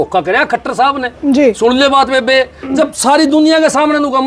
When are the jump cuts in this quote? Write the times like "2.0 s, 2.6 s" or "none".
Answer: none